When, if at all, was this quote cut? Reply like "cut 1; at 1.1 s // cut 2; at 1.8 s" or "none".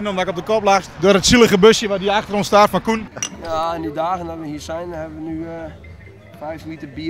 cut 1; at 0.9 s // cut 2; at 3.0 s